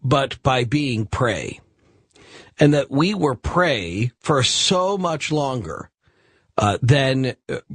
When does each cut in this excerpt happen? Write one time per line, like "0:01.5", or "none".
0:01.8